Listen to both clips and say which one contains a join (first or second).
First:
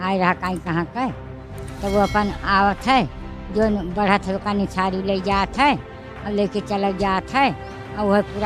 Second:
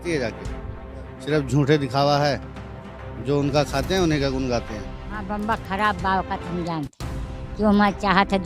second